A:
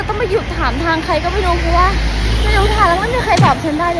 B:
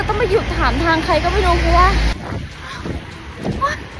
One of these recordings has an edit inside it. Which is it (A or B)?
B